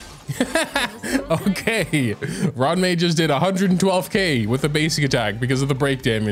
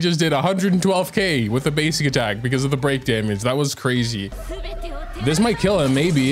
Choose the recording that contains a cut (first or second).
second